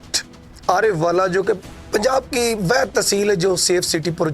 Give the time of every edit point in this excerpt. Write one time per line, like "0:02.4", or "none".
0:01.7